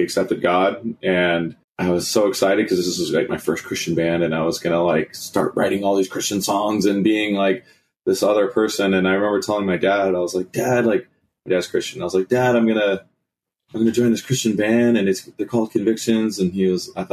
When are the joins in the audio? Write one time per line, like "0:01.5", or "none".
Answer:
0:01.6